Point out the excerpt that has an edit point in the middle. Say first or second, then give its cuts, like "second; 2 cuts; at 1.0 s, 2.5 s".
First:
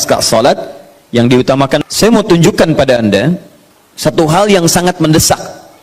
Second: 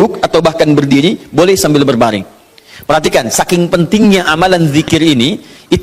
first; 1 cut; at 1.8 s